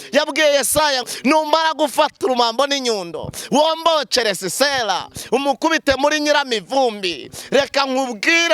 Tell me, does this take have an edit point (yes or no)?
yes